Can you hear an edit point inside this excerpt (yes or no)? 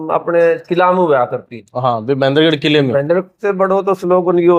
yes